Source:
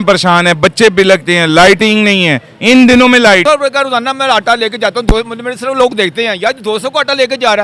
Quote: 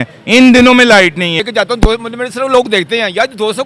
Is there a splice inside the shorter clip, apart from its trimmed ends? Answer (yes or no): yes